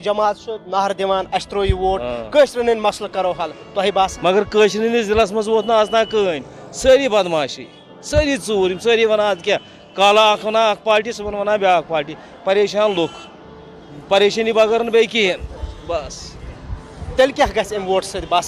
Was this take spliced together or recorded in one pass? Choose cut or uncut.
uncut